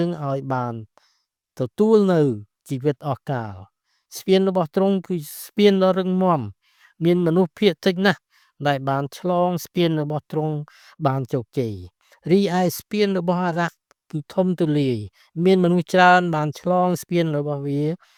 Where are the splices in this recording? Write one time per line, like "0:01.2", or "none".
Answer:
none